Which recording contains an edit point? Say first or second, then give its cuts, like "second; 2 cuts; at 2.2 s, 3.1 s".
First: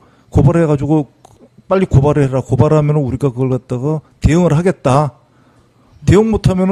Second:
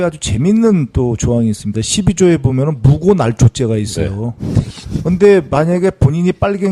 second; 1 cut; at 3.7 s